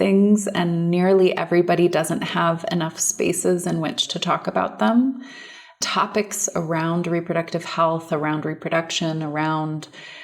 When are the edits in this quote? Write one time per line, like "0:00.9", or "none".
0:05.8